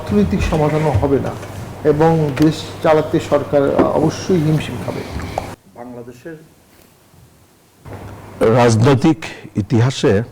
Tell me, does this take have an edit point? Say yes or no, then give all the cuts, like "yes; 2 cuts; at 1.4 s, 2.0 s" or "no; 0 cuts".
yes; 1 cut; at 5.6 s